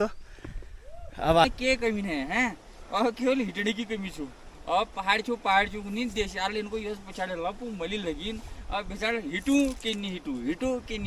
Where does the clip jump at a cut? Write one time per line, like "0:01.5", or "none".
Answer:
0:01.4